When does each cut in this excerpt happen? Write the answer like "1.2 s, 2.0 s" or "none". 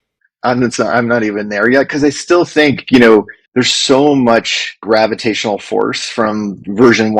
3.4 s, 4.8 s